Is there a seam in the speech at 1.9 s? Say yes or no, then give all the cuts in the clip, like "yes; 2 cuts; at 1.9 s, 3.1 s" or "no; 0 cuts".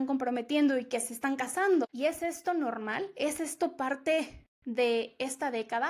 yes; 1 cut; at 1.9 s